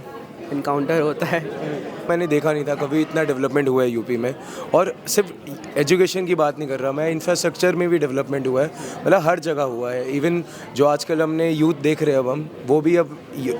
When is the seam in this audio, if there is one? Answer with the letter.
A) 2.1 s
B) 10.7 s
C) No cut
A